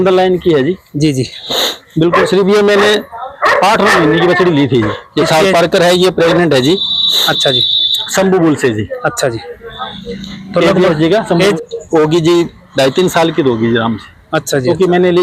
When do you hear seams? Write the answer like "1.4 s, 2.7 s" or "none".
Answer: none